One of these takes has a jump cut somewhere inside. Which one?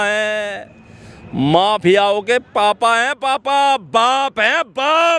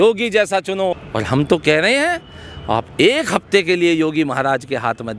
second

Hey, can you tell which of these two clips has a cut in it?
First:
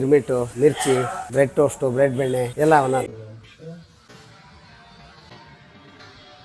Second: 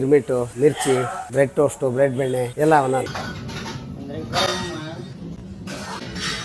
first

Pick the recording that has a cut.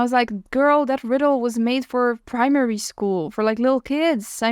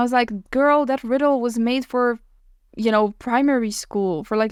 first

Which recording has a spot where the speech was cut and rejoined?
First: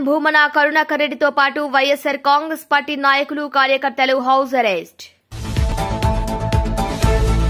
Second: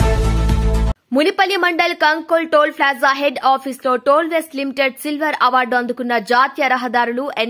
second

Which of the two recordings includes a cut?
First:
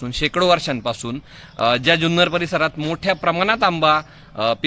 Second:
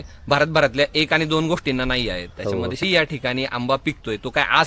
second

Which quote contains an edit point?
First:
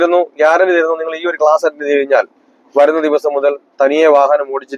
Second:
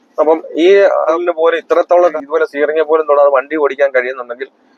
second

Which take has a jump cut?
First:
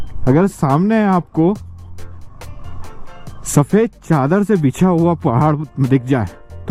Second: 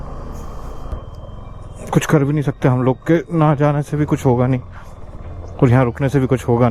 second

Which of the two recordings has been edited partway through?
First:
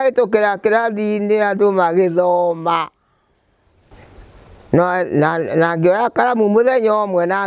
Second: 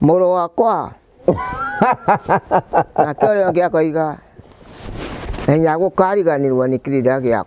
first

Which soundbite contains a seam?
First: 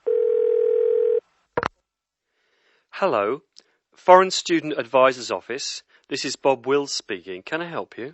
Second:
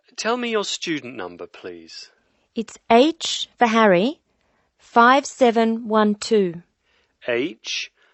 first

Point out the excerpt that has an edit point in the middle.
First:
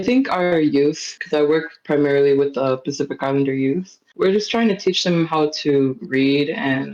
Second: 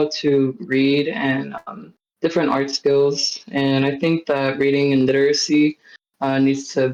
first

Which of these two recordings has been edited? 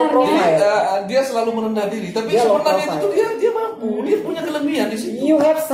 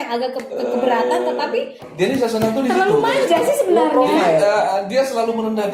second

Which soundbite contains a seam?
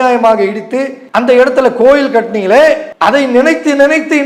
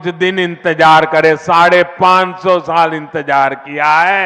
first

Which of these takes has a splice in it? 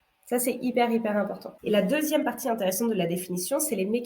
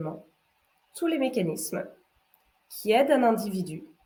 first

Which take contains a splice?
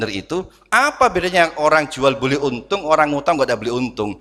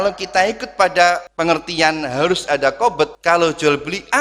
second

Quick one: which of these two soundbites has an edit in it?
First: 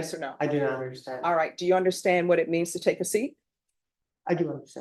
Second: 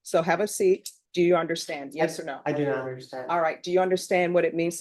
second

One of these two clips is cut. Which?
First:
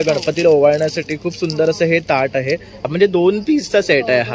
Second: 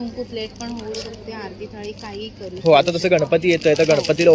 first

